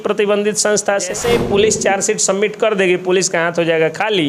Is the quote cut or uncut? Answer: cut